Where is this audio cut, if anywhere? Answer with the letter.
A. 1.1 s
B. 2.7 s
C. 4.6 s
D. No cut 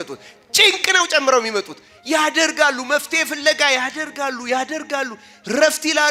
D